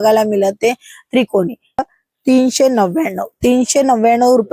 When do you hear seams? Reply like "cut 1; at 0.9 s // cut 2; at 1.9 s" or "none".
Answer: cut 1; at 1.8 s